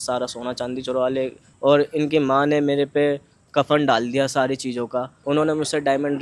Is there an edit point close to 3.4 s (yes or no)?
no